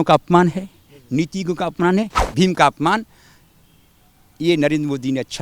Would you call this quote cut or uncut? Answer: cut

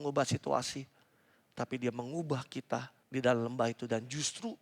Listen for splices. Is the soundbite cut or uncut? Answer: cut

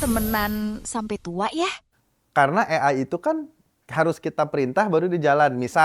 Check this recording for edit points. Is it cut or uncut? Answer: cut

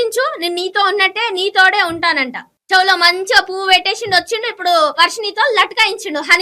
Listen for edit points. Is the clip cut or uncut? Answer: cut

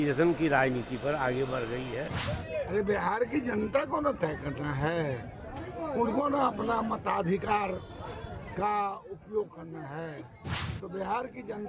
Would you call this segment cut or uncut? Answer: cut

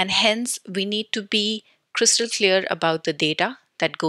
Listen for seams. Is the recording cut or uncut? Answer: uncut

